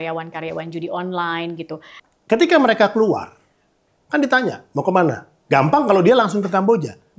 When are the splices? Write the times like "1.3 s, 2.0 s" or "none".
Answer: 1.9 s